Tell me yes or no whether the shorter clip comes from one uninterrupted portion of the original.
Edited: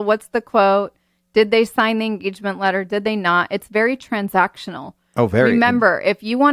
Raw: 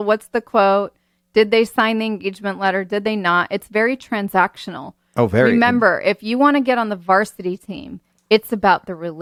yes